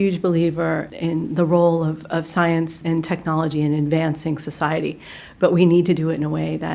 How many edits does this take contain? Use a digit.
2